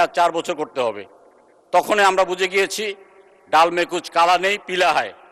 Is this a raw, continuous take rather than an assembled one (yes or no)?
yes